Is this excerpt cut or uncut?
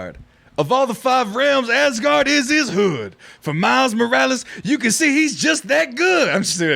uncut